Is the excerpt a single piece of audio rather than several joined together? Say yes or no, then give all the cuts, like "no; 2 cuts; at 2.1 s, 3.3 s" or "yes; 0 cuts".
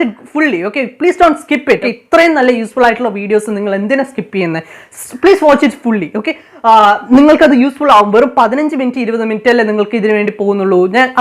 no; 1 cut; at 1.9 s